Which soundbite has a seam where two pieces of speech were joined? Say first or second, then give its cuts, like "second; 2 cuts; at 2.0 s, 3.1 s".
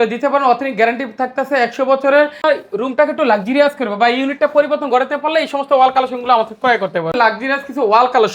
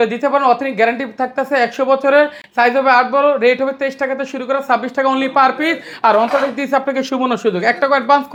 first; 2 cuts; at 2.4 s, 7.1 s